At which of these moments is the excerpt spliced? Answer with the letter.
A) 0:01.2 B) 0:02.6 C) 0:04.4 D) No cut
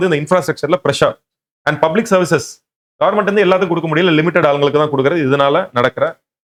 D